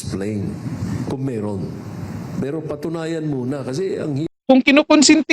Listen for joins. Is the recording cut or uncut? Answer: cut